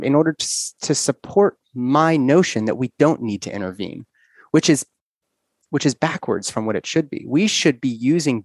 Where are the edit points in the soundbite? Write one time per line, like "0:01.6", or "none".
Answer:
none